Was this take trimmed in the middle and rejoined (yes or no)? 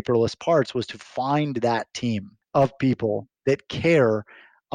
yes